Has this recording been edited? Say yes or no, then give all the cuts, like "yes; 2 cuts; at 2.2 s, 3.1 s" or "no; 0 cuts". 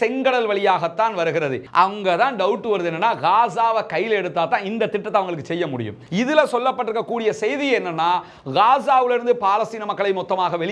yes; 2 cuts; at 1.6 s, 6.0 s